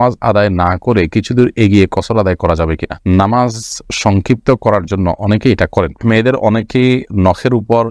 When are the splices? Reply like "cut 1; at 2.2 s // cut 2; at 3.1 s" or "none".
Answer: cut 1; at 6.0 s